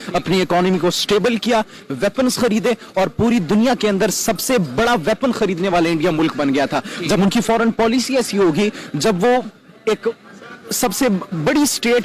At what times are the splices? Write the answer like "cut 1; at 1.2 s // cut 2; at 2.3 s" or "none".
none